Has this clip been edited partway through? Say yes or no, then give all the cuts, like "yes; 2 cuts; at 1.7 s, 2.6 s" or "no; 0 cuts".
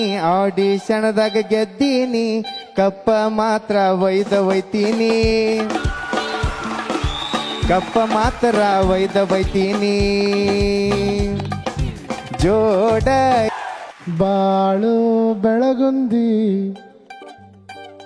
yes; 1 cut; at 13.5 s